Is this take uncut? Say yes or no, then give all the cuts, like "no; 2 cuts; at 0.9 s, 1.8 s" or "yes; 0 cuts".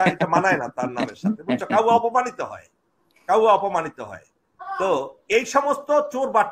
yes; 0 cuts